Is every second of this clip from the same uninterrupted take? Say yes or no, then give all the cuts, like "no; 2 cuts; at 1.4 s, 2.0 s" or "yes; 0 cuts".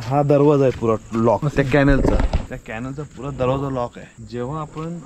yes; 0 cuts